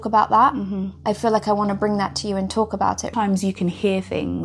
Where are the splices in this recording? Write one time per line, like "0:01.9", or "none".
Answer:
0:03.1

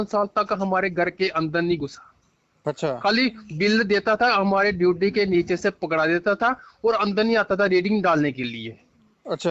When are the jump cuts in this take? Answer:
none

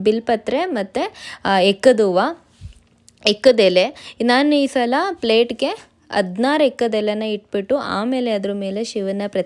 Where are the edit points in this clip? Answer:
none

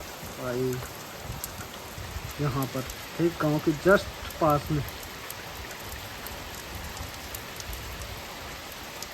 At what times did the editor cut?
none

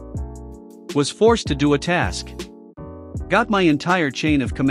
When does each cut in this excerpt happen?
0:00.9

